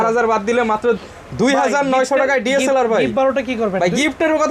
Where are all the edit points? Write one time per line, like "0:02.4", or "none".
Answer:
none